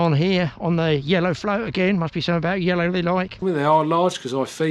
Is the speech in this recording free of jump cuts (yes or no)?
no